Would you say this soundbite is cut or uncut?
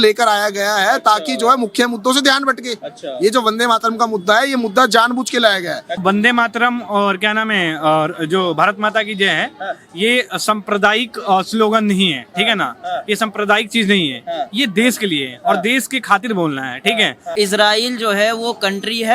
cut